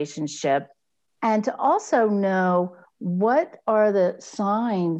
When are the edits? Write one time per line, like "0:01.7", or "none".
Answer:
0:01.1